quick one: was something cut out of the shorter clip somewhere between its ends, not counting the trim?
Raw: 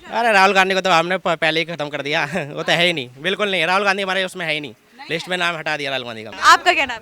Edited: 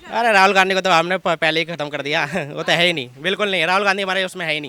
no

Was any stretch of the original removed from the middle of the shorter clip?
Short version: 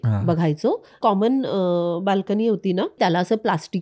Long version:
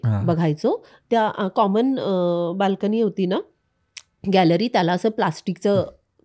yes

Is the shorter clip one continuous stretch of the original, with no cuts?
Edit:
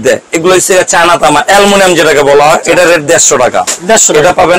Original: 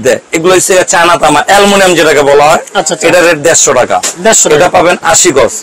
no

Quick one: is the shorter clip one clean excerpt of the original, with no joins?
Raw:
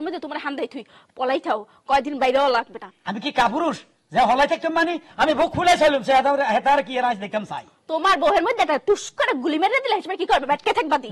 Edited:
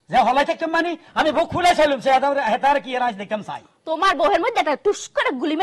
yes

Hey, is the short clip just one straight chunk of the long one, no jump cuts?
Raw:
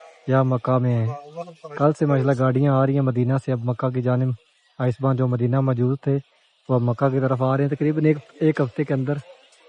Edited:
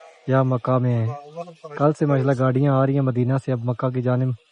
yes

